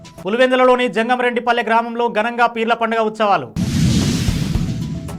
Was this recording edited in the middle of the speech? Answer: no; 0 cuts

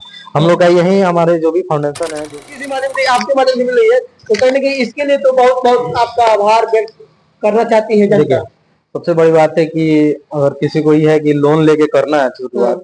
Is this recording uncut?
no; 1 cut; at 2.3 s

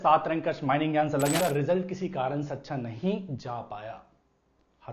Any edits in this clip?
yes; 1 cut; at 1.4 s

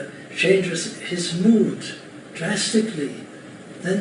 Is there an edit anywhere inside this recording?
no; 0 cuts

